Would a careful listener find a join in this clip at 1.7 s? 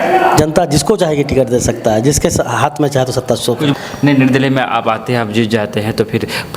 no; 1 cut; at 3.7 s

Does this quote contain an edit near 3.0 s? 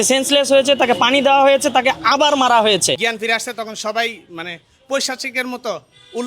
yes; 1 cut; at 3.0 s

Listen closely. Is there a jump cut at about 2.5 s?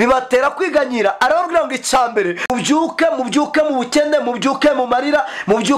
yes; 1 cut; at 2.5 s

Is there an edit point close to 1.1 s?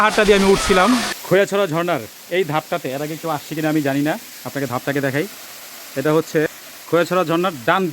yes; 1 cut; at 1.1 s

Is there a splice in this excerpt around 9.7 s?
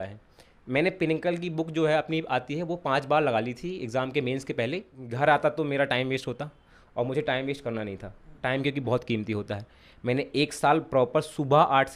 no; 1 cut; at 5.0 s

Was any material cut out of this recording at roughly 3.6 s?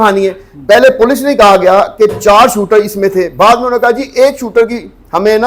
no; 0 cuts

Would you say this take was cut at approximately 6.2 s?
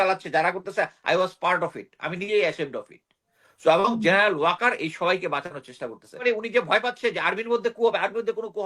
yes; 1 cut; at 6.2 s

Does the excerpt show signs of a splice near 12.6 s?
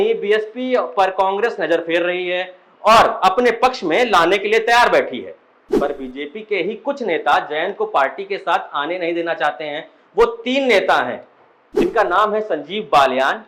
no; 1 cut; at 5.8 s

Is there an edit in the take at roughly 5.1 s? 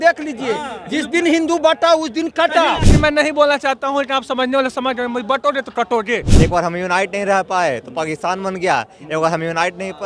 no; 2 cuts; at 2.9 s, 6.3 s

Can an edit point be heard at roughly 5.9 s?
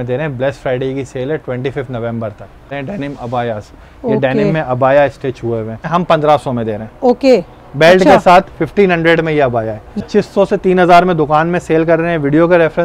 yes; 3 cuts; at 2.7 s, 5.9 s, 10.0 s

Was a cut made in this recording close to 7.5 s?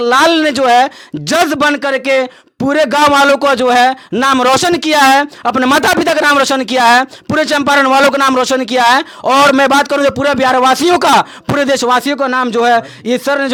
no; 0 cuts

